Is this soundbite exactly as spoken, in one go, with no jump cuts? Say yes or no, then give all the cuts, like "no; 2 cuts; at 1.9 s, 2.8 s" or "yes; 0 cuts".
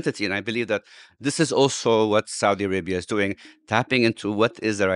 yes; 0 cuts